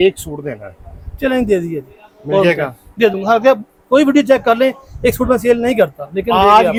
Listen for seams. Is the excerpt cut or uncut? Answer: uncut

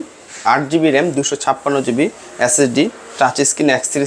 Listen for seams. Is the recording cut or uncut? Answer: uncut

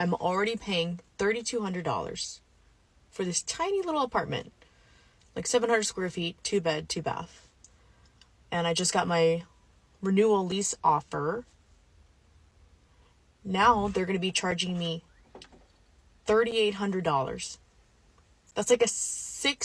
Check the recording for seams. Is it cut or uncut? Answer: uncut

